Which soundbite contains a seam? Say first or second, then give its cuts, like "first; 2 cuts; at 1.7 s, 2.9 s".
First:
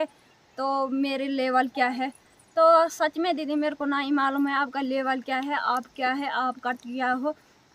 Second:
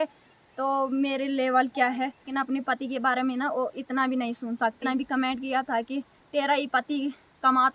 second; 2 cuts; at 2.3 s, 4.8 s